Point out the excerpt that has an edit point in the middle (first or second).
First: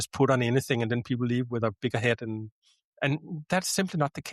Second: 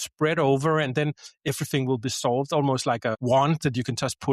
second